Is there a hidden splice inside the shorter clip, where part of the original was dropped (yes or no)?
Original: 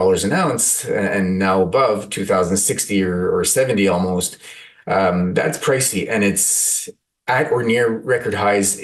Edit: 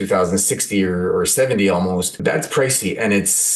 yes